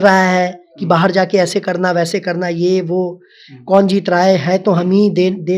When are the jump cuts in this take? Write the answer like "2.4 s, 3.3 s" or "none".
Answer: none